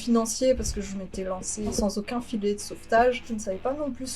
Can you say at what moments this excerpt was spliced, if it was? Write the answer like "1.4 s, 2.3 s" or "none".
1.7 s, 3.3 s

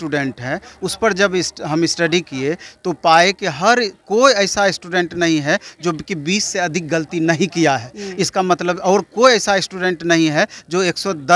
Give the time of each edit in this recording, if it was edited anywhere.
none

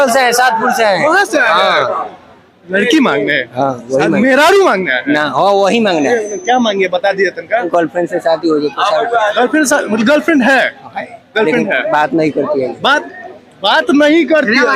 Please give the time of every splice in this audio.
none

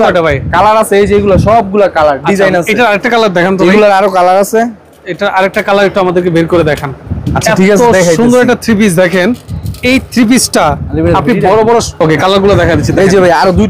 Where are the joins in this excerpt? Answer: none

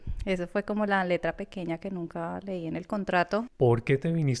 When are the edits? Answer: 3.5 s

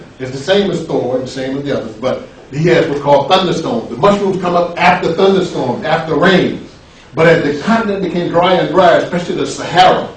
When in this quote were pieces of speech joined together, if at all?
7.3 s

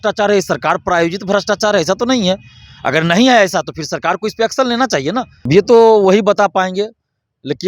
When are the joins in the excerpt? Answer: 5.5 s

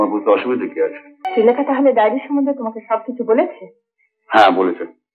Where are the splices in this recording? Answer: 1.2 s

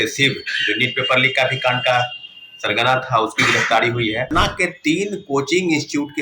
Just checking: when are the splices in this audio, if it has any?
4.3 s

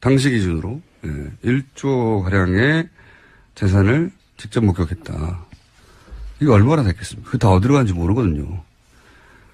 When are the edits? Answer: 1.6 s

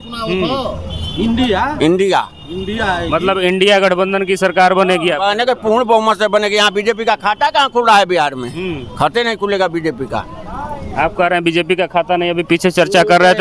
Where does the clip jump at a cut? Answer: none

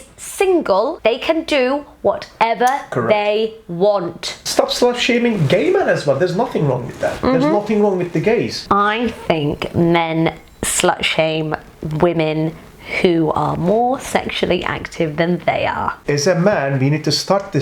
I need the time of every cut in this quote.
0.9 s, 4.4 s, 8.6 s, 16.0 s

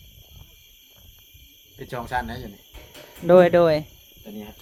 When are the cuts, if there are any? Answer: none

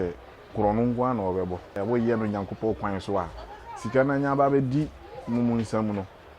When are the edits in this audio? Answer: 1.8 s

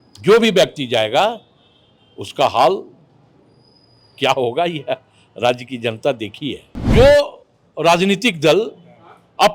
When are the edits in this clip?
6.9 s

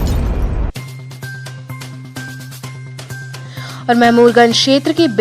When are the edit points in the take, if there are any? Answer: none

